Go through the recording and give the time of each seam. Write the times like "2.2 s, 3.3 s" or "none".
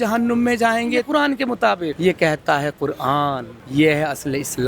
1.1 s, 1.9 s, 3.5 s